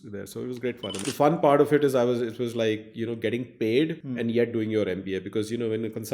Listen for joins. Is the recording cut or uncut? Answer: cut